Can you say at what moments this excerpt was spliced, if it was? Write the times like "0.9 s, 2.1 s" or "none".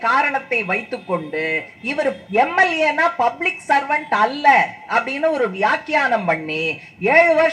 2.2 s